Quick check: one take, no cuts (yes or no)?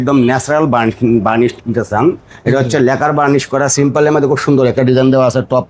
yes